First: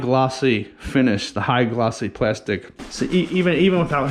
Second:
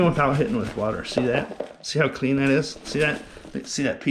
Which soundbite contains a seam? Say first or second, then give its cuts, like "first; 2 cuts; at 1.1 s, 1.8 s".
first; 1 cut; at 2.8 s